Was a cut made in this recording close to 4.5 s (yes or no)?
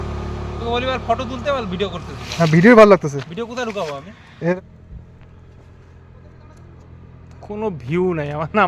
yes